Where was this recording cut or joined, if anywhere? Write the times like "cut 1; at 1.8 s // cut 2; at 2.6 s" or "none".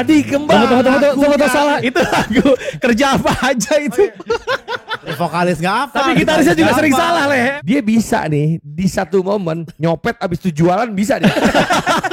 cut 1; at 1.8 s // cut 2; at 5.0 s // cut 3; at 7.5 s